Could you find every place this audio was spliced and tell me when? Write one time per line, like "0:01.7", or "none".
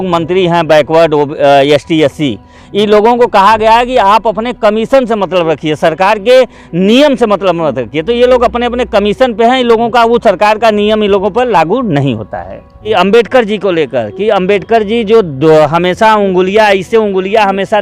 0:12.9